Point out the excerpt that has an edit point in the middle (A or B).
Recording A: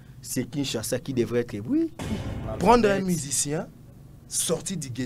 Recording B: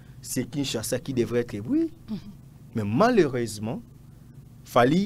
A